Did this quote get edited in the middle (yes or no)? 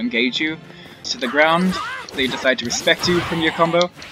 yes